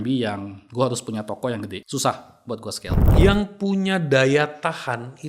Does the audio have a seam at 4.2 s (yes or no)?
no